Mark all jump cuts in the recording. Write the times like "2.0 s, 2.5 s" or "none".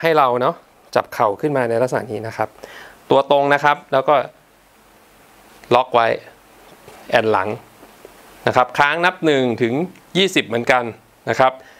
none